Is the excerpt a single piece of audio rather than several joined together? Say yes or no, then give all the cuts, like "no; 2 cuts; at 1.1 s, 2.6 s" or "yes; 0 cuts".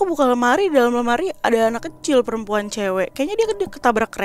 yes; 0 cuts